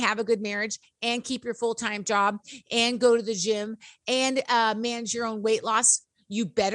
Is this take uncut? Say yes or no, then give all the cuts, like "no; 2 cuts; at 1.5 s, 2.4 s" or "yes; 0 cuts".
yes; 0 cuts